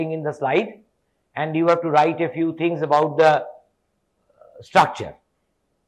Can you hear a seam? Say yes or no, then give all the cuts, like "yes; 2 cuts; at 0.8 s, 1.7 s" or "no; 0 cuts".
no; 0 cuts